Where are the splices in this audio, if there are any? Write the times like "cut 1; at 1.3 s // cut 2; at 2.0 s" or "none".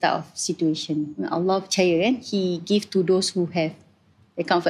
cut 1; at 1.1 s // cut 2; at 2.2 s